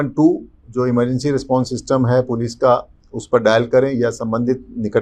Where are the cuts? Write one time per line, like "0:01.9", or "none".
none